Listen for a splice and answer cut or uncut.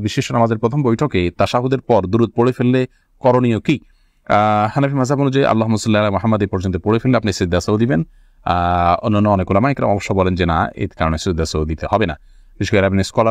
uncut